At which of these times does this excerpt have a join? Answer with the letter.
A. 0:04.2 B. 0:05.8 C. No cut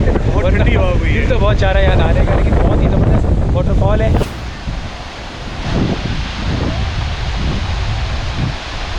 A